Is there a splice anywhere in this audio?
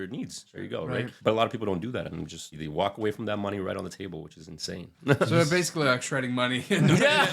yes; 3 cuts; at 0.9 s, 2.6 s, 4.9 s

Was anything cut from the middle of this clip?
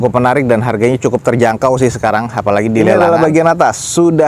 yes; 1 cut; at 3.0 s

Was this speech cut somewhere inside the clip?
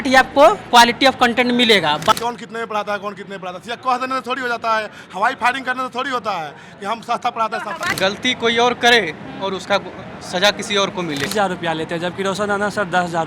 yes; 3 cuts; at 2.1 s, 7.9 s, 11.3 s

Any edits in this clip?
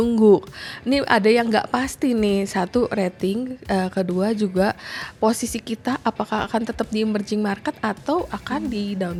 no; 0 cuts

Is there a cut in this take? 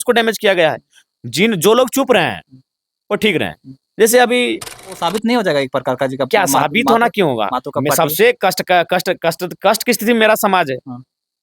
yes; 1 cut; at 4.9 s

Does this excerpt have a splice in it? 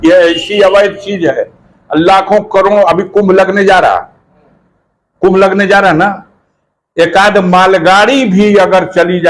no; 0 cuts

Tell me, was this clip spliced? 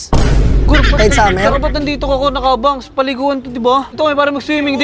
yes; 1 cut; at 3.9 s

